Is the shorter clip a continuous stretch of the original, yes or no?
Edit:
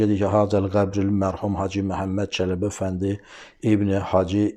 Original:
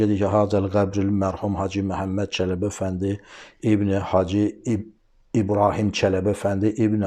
yes